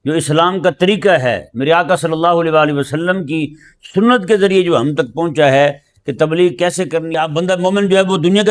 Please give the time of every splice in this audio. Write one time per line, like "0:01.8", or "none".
0:07.1